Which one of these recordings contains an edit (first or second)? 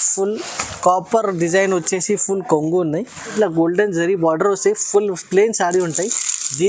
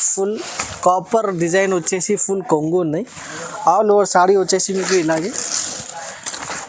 first